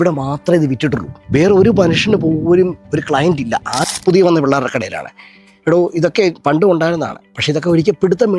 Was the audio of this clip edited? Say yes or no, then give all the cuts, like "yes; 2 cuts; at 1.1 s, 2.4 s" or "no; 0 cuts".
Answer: yes; 1 cut; at 3.7 s